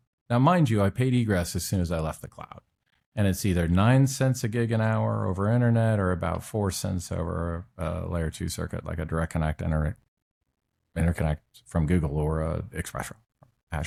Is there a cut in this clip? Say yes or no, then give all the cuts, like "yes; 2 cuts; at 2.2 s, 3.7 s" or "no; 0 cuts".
no; 0 cuts